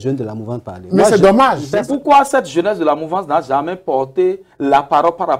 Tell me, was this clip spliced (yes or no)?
yes